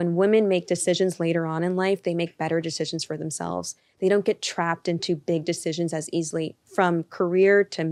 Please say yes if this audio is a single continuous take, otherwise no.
yes